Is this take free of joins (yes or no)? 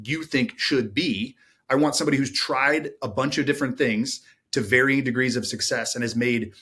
yes